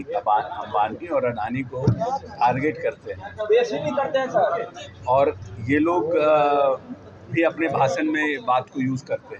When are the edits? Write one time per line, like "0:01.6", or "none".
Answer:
none